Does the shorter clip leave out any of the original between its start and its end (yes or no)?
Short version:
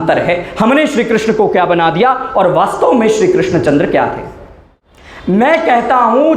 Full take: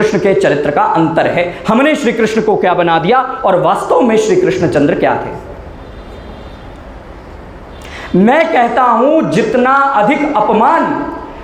yes